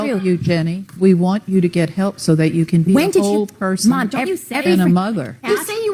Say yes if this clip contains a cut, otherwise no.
no